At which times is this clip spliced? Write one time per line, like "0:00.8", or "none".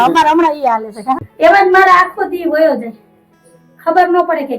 0:01.3